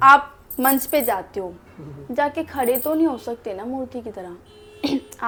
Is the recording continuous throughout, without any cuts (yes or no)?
yes